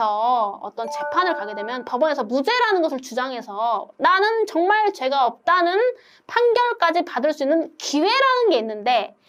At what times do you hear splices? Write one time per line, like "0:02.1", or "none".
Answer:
none